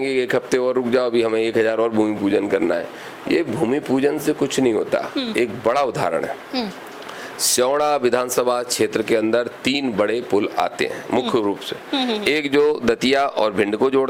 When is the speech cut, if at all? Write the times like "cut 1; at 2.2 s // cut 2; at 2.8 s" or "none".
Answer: none